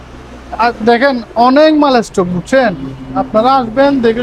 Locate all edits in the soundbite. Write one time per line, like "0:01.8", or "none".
none